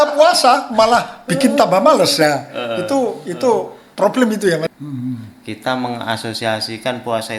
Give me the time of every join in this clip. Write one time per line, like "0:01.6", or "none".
0:04.7